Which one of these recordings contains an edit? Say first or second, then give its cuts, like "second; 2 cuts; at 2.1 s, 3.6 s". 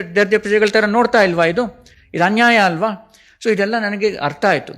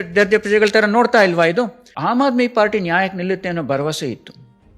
second; 1 cut; at 1.9 s